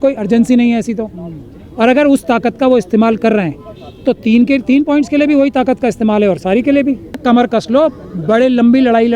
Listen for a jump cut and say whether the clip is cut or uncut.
cut